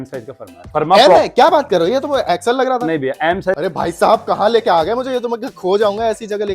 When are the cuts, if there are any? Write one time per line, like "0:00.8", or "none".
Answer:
0:03.6